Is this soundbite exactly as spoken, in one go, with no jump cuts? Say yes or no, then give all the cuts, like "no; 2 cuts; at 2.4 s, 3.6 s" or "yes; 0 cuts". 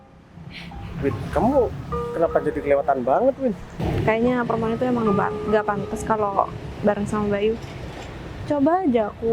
no; 1 cut; at 3.7 s